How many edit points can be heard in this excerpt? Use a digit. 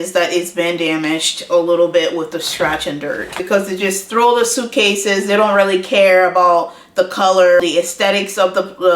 2